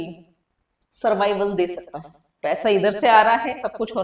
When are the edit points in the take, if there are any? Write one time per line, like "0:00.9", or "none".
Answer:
0:02.3